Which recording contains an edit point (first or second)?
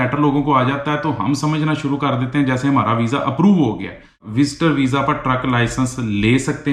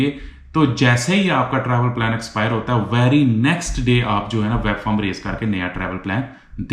first